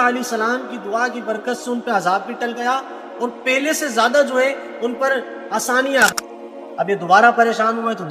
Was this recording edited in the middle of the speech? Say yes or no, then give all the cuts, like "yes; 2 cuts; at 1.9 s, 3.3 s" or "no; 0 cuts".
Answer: yes; 1 cut; at 6.2 s